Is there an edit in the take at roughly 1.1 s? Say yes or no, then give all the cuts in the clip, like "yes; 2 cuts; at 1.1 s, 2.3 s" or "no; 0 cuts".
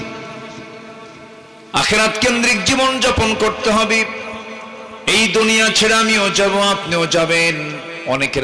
no; 0 cuts